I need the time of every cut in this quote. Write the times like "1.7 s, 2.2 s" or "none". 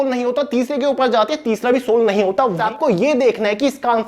2.6 s

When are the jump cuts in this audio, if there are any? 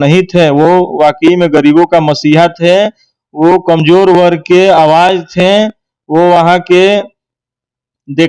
none

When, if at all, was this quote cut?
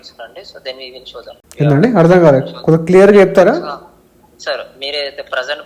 1.4 s

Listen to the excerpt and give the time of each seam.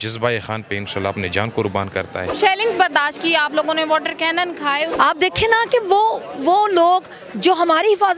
2.2 s, 4.9 s

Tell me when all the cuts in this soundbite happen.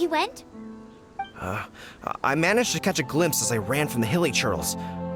none

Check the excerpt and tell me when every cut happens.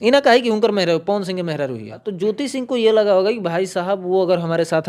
2.0 s

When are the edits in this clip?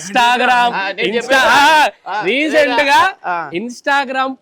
none

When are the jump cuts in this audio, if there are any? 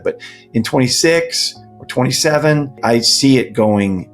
2.8 s

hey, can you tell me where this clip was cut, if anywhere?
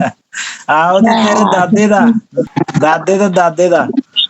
2.5 s

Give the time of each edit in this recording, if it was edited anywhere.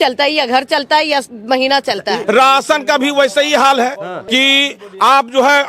2.2 s, 4.1 s

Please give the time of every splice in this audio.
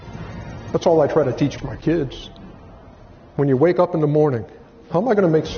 1.6 s

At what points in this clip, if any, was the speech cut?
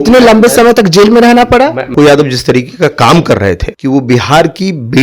1.9 s, 3.7 s

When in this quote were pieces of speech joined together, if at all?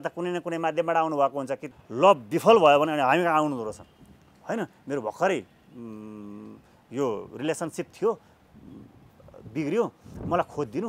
1.7 s

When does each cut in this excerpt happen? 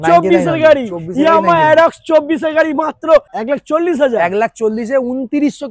3.3 s

